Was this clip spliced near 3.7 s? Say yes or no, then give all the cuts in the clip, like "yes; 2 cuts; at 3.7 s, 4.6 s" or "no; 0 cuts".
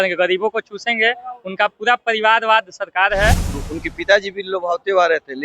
yes; 1 cut; at 3.7 s